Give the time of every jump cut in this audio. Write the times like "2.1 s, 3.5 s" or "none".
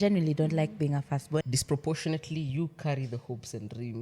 1.5 s